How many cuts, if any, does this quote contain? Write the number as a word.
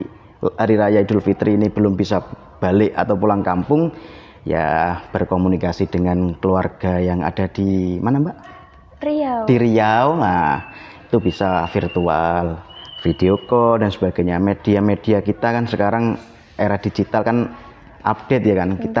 zero